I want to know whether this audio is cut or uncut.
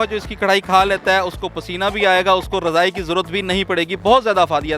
uncut